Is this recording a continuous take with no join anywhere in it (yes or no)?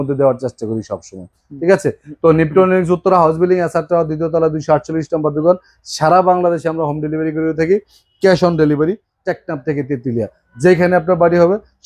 yes